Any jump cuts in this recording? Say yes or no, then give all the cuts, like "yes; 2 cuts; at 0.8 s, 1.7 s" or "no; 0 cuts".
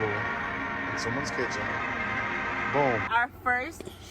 yes; 1 cut; at 3.1 s